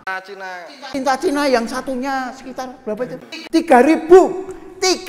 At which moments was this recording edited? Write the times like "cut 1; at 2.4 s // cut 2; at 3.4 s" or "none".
cut 1; at 3.0 s